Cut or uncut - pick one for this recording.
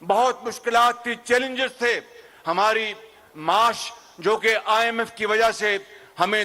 uncut